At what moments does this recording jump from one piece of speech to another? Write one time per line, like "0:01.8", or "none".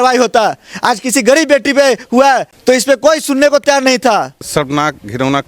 0:04.4